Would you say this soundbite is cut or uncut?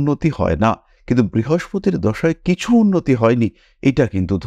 uncut